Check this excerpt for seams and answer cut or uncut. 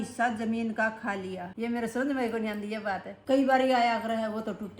cut